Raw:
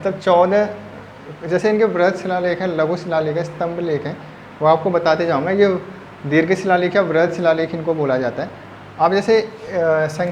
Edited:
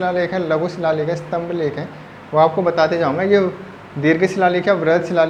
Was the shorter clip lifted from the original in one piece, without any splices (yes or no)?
yes